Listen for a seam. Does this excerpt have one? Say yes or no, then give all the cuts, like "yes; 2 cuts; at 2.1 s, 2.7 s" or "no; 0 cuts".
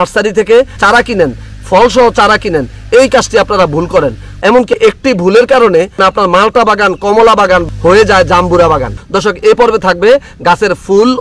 yes; 3 cuts; at 0.8 s, 4.6 s, 8.9 s